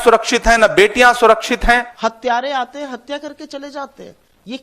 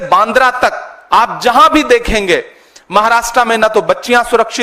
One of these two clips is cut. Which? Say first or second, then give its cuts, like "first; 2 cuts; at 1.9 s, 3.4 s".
first; 1 cut; at 1.9 s